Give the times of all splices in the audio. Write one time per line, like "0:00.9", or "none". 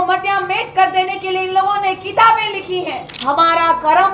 0:03.1